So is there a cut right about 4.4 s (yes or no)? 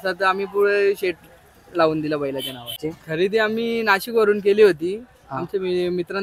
no